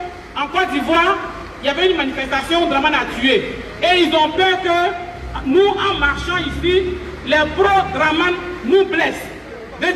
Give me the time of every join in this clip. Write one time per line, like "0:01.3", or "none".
none